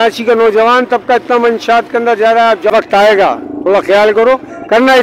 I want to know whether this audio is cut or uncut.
cut